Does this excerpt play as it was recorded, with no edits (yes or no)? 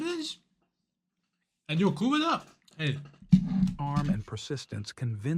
yes